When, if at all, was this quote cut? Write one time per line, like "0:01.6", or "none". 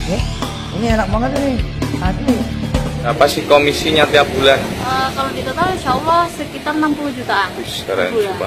0:03.1